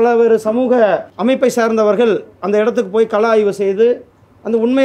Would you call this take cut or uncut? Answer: cut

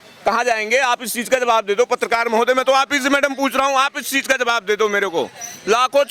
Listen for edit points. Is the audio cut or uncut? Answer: uncut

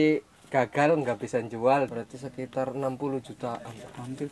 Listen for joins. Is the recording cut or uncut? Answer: cut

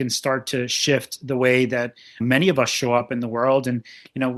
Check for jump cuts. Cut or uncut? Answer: uncut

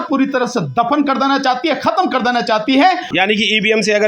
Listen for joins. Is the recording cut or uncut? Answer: cut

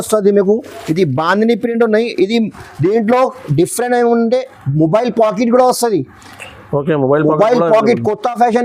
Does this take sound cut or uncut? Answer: uncut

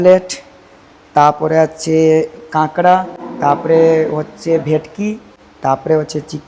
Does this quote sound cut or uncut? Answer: uncut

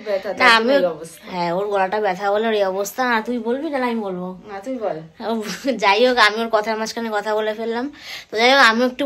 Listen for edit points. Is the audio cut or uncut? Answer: uncut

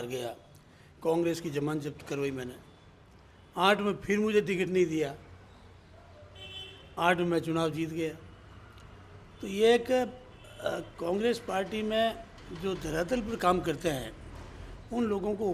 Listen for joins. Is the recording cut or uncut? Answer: uncut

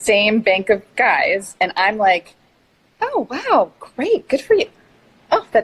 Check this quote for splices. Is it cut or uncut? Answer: uncut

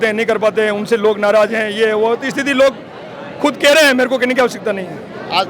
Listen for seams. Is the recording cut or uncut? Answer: uncut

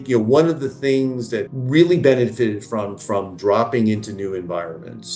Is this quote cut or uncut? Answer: cut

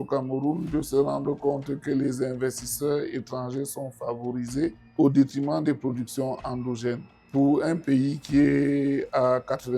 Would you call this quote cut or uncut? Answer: cut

